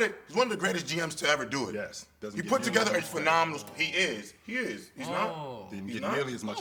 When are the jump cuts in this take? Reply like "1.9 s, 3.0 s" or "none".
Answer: none